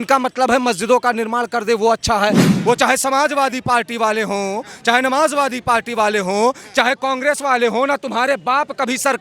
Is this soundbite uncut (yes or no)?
no